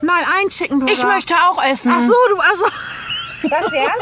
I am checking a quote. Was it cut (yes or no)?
no